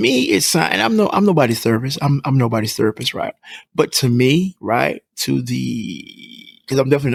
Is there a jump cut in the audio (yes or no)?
no